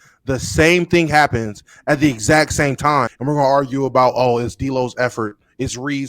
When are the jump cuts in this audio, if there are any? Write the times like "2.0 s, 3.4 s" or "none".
3.1 s